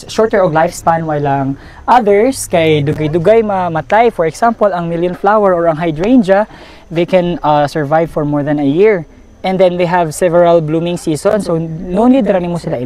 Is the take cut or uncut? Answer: uncut